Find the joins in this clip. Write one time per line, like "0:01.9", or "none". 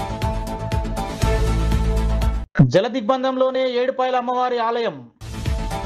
none